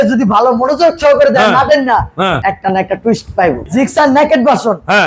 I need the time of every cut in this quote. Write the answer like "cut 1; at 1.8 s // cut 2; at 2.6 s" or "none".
cut 1; at 2.4 s // cut 2; at 3.6 s